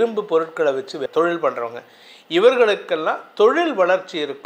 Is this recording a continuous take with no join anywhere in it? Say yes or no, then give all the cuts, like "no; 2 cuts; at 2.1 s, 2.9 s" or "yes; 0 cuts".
no; 1 cut; at 1.0 s